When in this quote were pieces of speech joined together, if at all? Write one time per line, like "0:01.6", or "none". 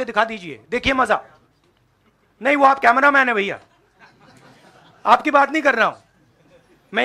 none